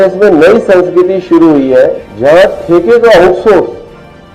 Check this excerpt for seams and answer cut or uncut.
cut